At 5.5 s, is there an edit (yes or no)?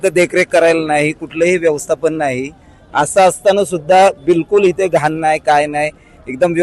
no